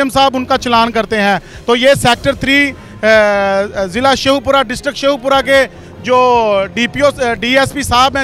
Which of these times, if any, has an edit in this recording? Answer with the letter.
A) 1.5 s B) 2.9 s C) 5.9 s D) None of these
D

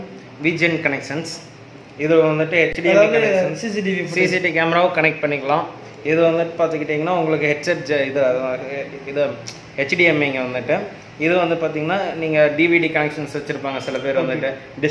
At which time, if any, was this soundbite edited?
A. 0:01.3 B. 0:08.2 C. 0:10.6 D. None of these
D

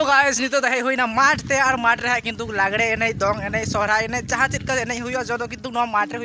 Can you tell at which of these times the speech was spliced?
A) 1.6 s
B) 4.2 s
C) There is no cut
C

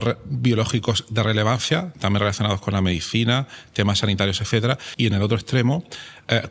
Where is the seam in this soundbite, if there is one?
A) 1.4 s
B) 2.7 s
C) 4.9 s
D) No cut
C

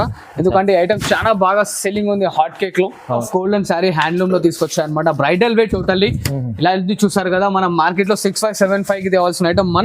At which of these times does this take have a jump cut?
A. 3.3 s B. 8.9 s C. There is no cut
A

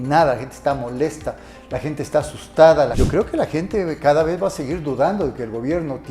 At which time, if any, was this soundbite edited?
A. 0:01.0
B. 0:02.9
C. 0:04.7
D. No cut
B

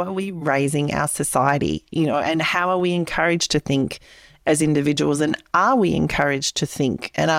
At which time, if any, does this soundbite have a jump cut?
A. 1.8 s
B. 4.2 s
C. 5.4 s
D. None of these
D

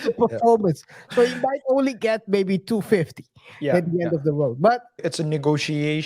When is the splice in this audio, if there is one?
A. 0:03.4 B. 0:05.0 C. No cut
B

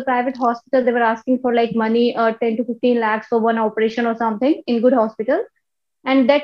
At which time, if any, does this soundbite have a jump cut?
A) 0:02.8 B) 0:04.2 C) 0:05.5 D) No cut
D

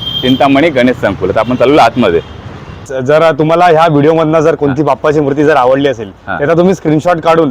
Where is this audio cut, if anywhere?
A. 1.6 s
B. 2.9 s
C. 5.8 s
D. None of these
B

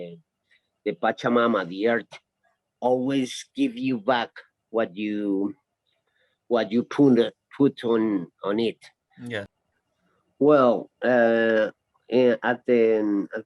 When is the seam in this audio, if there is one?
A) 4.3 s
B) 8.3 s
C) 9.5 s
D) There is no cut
C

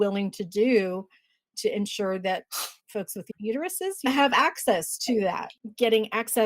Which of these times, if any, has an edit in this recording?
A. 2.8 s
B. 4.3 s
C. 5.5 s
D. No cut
C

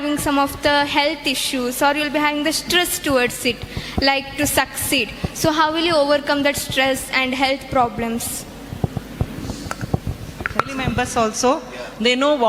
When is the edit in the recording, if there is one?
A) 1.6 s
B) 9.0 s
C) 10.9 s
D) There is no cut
C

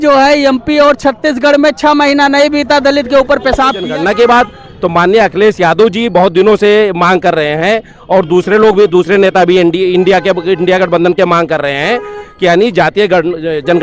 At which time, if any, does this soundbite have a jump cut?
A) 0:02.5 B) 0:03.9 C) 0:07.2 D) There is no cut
B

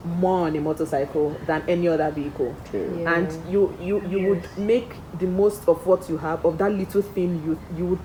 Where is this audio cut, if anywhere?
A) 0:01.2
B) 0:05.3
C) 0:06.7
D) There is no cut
D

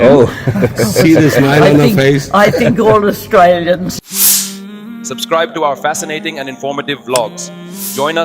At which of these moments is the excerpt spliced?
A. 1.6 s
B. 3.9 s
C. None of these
B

